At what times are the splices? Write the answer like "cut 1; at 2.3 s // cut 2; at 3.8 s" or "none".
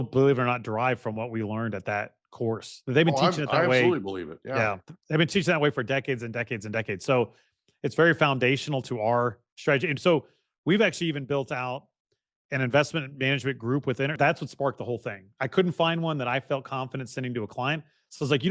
cut 1; at 14.2 s